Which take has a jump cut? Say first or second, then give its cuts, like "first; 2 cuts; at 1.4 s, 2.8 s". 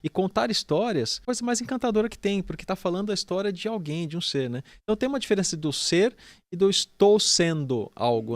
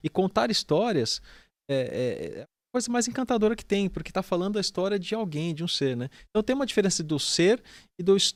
first; 1 cut; at 1.1 s